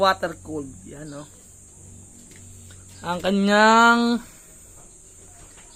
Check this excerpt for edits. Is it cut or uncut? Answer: uncut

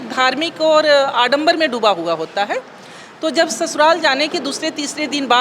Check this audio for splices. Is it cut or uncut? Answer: uncut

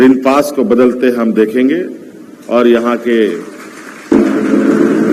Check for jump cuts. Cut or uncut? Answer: uncut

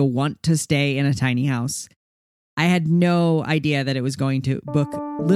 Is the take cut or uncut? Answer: cut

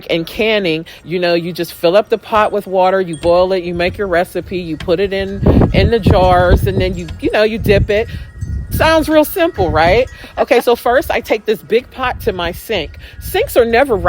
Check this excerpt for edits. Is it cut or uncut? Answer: cut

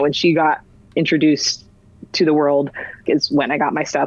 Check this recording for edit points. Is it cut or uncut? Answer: cut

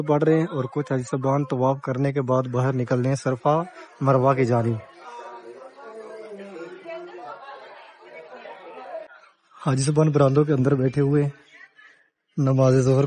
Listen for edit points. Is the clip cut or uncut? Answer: cut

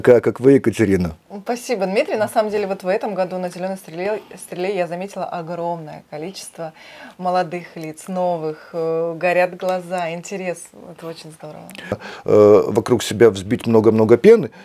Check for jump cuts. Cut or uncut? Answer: cut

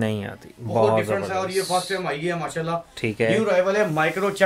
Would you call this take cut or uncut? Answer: uncut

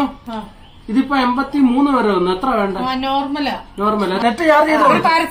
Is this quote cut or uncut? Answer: cut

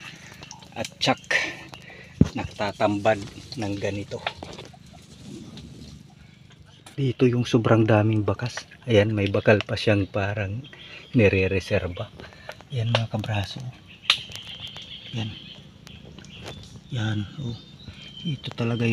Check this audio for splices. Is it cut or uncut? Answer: cut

